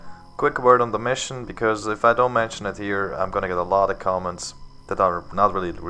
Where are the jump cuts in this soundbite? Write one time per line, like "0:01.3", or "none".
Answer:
none